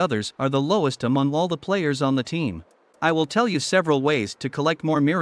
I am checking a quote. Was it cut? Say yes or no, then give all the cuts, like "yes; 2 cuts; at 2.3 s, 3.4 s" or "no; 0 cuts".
yes; 1 cut; at 2.9 s